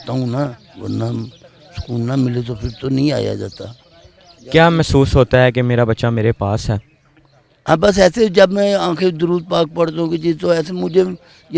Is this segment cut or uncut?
uncut